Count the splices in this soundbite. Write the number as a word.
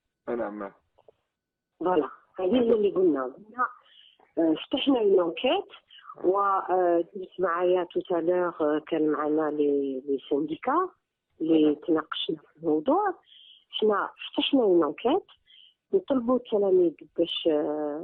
zero